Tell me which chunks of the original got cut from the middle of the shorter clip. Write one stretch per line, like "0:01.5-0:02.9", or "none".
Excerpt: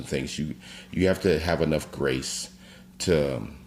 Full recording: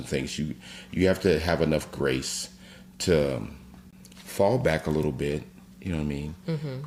none